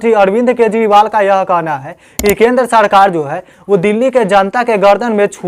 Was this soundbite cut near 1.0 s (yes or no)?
no